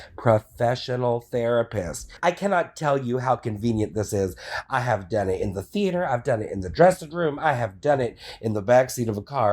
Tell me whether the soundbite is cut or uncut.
cut